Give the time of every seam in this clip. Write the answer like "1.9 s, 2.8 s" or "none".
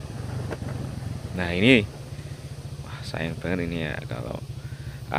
1.3 s